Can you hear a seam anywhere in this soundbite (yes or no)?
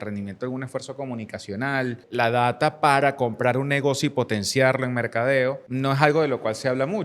yes